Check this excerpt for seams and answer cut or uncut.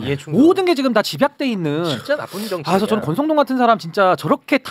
uncut